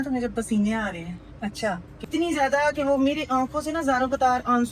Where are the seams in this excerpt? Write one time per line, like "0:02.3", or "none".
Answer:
0:02.0

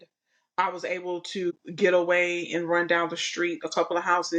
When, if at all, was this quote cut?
0:01.5

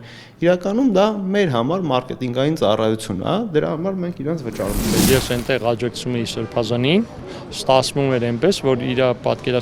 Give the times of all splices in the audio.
0:05.0

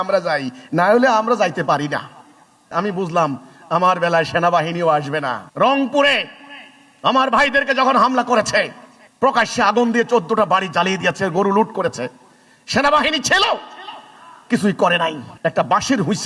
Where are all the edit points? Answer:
0:05.4
0:15.3

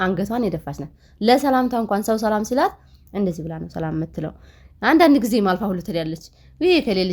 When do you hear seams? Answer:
none

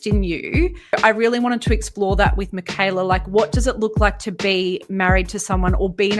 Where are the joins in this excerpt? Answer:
0:00.9

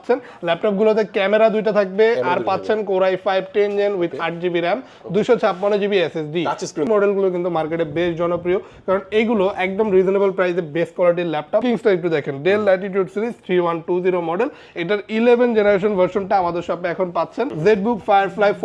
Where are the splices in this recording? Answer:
0:06.9
0:11.6
0:17.5

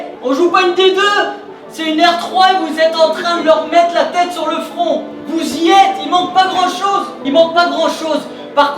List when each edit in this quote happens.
0:05.2
0:07.1

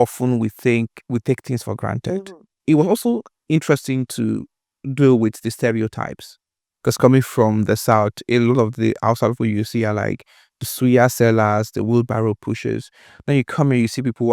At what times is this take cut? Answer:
0:02.6

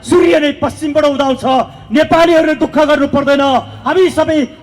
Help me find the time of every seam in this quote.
none

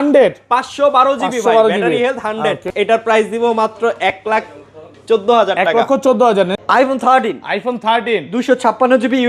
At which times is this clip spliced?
0:02.7
0:06.6

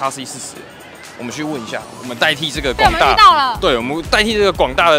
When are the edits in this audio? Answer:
none

